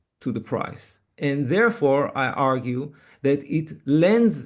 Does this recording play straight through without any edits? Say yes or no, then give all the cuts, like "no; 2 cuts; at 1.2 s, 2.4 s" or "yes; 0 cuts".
yes; 0 cuts